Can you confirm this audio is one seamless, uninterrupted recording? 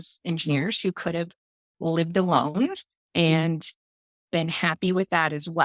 yes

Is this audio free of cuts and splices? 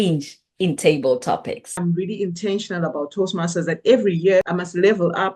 no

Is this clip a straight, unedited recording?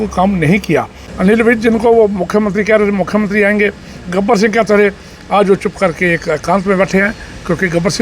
no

